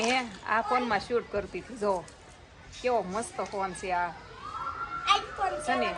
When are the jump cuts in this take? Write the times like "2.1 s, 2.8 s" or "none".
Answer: none